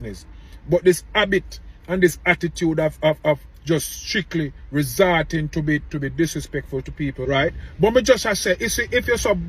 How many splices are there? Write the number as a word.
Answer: one